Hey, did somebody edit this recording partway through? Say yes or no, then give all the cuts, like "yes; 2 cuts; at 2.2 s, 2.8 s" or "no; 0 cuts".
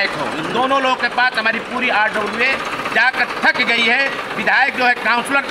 no; 0 cuts